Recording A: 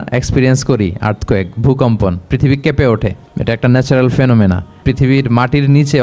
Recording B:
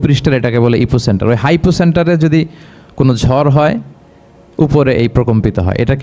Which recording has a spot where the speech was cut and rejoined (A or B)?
A